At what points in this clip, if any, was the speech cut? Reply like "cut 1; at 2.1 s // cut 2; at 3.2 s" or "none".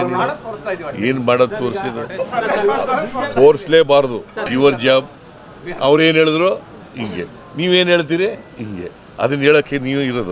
cut 1; at 4.5 s